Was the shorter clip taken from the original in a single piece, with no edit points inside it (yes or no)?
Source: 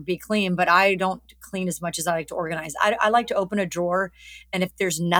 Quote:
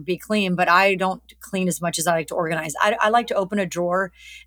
yes